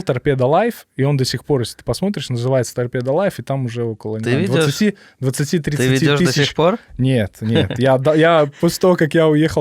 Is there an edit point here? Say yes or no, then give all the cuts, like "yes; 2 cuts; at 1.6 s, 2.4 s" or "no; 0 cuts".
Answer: no; 0 cuts